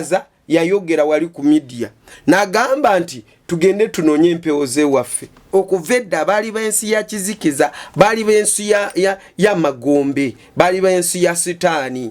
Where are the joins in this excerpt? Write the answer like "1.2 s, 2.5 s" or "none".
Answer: 5.5 s